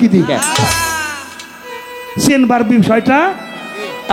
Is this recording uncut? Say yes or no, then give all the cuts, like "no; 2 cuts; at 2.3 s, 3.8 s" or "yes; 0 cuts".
yes; 0 cuts